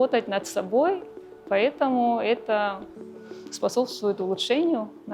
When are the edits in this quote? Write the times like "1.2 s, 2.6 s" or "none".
none